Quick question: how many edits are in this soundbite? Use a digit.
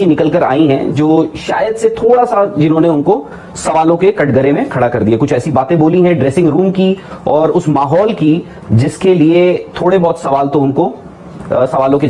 0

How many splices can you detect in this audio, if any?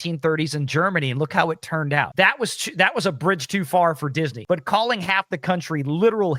2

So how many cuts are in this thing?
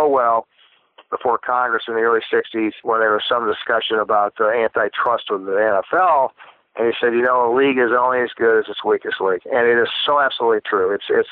1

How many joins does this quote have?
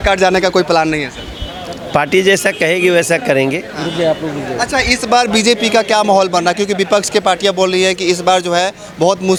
0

